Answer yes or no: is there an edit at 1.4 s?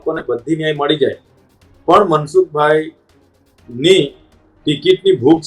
no